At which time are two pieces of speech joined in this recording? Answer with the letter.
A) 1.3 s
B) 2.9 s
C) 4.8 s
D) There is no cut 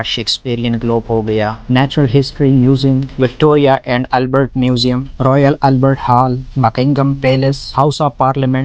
D